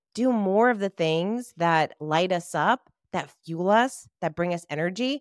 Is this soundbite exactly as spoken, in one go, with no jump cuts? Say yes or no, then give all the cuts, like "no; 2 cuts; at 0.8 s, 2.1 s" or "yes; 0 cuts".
yes; 0 cuts